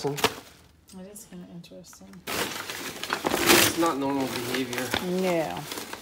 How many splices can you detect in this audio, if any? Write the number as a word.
one